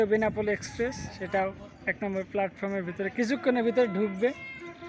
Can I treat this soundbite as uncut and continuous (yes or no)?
no